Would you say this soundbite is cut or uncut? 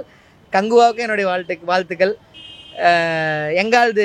uncut